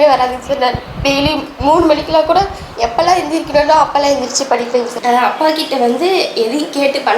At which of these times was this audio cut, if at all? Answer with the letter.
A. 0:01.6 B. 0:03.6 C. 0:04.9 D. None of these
C